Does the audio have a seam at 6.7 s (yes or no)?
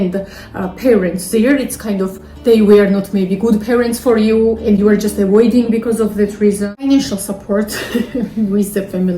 yes